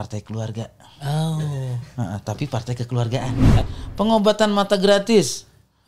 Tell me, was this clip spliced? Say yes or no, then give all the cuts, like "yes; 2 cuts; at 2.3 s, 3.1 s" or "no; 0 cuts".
yes; 1 cut; at 3.6 s